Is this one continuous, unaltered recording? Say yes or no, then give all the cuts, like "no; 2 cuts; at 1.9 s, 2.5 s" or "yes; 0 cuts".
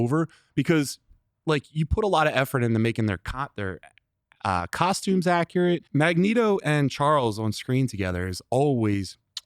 no; 1 cut; at 5.9 s